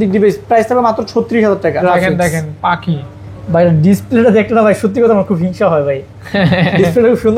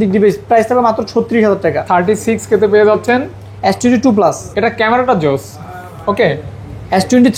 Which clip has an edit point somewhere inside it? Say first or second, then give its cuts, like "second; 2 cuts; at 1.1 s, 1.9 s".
first; 1 cut; at 1.8 s